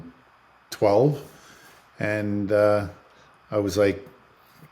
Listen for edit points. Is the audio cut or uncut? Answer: uncut